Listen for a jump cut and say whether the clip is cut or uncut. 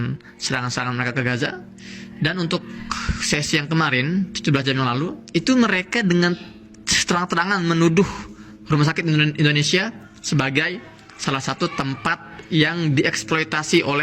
cut